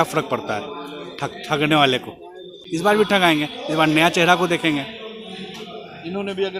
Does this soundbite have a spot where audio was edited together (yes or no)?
yes